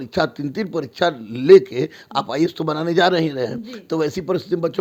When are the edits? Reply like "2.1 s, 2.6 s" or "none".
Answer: none